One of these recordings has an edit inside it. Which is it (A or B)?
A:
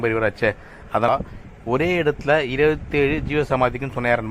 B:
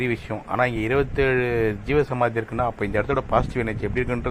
A